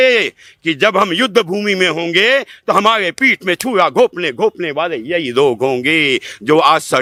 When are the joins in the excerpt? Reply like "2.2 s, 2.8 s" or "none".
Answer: none